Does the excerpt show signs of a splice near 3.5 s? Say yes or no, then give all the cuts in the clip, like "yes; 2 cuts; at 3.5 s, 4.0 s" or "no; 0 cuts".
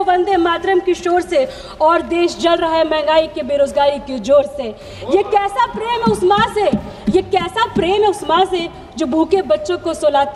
no; 0 cuts